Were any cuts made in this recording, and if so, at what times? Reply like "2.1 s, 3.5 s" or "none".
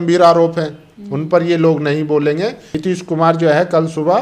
2.7 s